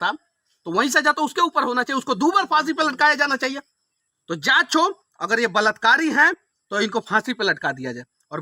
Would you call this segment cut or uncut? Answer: uncut